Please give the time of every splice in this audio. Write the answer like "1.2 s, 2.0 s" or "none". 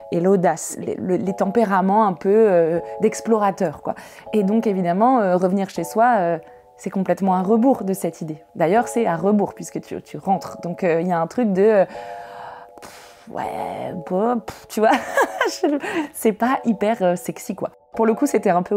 17.9 s